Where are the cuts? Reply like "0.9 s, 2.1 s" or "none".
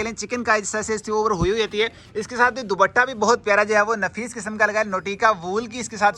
none